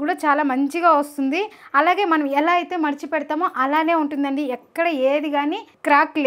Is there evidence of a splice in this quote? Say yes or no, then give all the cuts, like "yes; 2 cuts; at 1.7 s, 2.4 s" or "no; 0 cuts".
no; 0 cuts